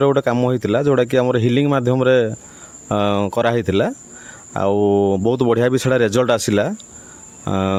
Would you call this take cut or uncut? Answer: uncut